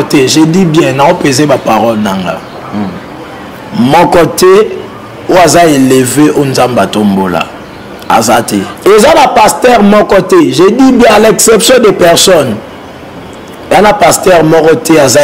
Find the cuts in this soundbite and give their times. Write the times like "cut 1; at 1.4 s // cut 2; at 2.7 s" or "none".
cut 1; at 8.7 s

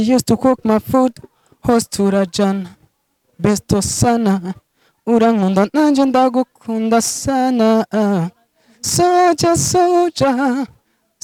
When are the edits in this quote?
none

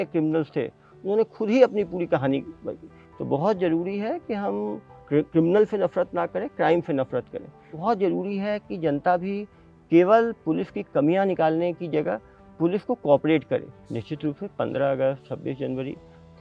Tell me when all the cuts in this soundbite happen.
cut 1; at 2.8 s // cut 2; at 4.9 s // cut 3; at 7.7 s // cut 4; at 13.8 s

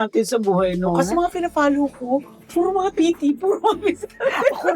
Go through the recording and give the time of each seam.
cut 1; at 1.1 s // cut 2; at 2.9 s

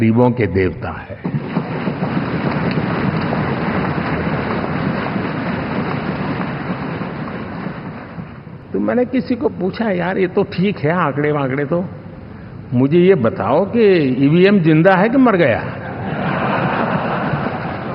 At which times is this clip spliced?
cut 1; at 8.6 s

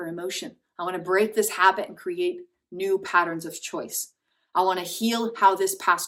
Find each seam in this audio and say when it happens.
none

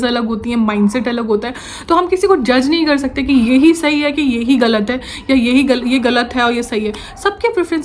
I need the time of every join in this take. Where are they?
none

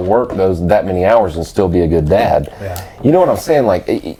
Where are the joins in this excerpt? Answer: none

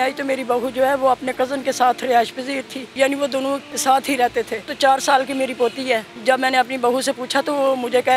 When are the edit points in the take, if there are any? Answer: cut 1; at 2.8 s // cut 2; at 3.7 s // cut 3; at 4.7 s // cut 4; at 6.1 s

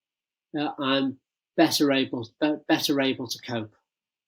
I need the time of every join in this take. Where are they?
none

